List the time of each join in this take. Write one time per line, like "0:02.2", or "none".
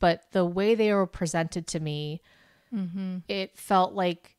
none